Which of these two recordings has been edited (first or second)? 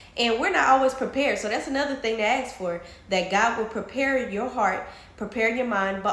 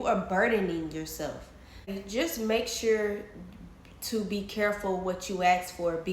second